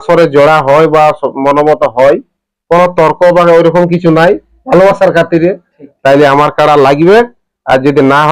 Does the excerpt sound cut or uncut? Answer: uncut